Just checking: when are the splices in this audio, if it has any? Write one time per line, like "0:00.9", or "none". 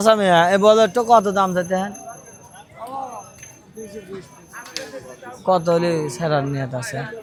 none